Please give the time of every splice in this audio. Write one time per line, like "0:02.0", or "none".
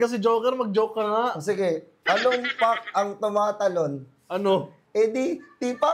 none